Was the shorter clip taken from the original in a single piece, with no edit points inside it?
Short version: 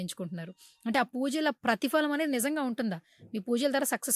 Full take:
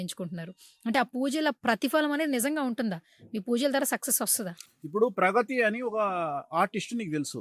yes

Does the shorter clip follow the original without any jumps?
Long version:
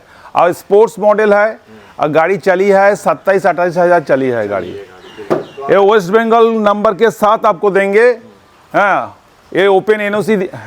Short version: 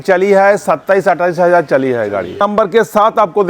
no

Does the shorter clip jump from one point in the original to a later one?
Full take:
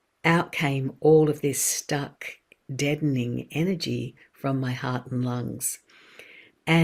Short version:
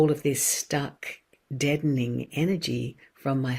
no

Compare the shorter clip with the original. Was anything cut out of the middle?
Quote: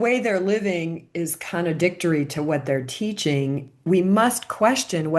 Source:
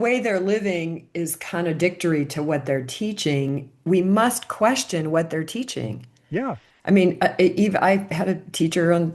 no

